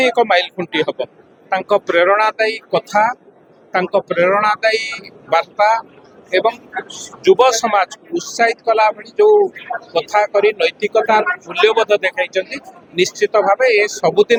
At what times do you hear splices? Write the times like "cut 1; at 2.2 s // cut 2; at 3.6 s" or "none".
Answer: none